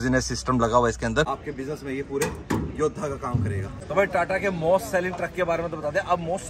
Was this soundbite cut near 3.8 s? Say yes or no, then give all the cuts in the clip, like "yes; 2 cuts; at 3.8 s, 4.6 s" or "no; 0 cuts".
yes; 2 cuts; at 1.3 s, 3.8 s